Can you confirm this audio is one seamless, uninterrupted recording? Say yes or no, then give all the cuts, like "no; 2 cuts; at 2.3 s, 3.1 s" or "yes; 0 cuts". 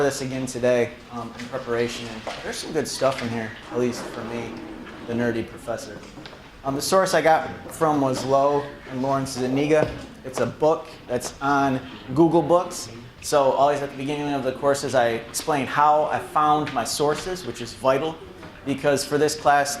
no; 1 cut; at 7.1 s